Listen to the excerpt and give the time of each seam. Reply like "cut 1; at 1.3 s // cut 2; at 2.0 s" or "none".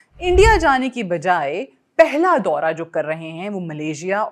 none